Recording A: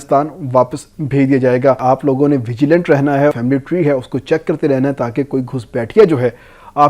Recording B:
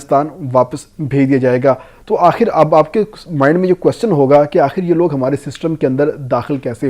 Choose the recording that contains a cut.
A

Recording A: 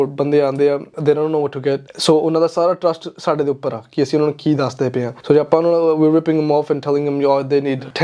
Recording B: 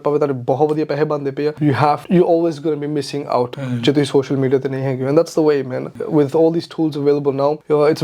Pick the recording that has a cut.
B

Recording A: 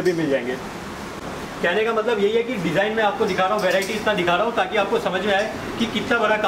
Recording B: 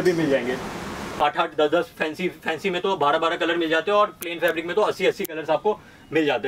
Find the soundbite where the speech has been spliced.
B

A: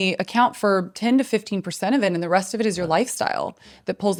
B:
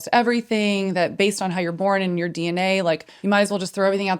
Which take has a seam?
B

